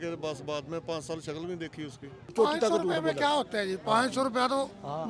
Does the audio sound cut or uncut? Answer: cut